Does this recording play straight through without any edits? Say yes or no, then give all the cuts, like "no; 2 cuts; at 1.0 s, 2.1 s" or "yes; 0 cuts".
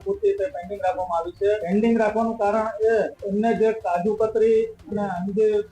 no; 2 cuts; at 1.6 s, 3.2 s